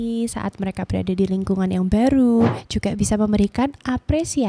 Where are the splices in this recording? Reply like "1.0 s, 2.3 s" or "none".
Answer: 2.7 s